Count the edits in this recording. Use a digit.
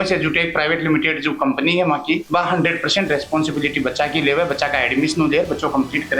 1